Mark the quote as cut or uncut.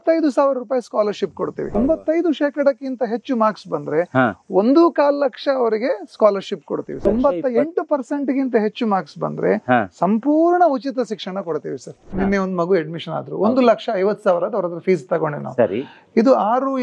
cut